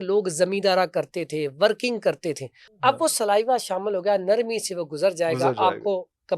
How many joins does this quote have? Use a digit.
1